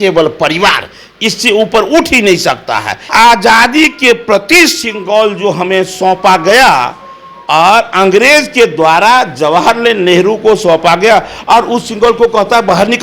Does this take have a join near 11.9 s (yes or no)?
no